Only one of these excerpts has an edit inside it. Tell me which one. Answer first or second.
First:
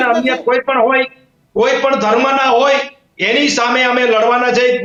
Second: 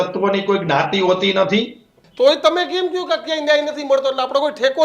second